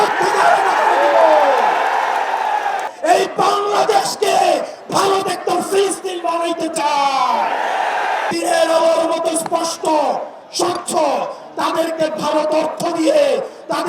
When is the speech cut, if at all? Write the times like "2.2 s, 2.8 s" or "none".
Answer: 2.9 s, 8.3 s